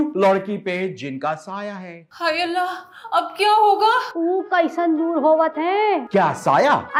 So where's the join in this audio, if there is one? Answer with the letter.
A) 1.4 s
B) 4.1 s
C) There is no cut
C